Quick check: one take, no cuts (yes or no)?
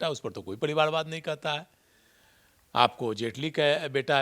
yes